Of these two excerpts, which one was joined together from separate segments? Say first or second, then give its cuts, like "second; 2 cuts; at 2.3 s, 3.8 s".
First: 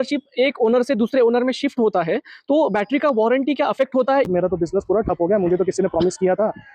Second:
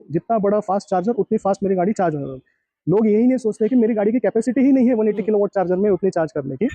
first; 1 cut; at 4.3 s